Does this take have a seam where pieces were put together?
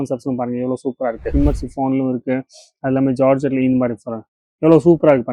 yes; 1 cut; at 1.3 s

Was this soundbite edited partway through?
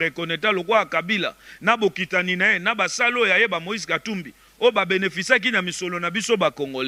no; 0 cuts

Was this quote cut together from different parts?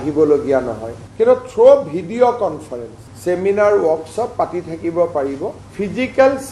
no; 0 cuts

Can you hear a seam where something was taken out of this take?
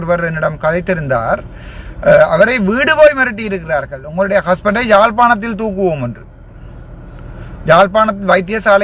no; 0 cuts

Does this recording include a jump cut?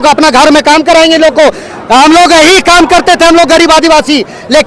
no; 0 cuts

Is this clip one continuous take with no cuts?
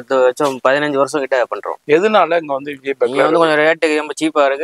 no; 1 cut; at 1.7 s

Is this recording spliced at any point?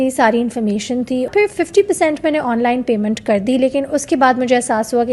yes; 1 cut; at 1.3 s

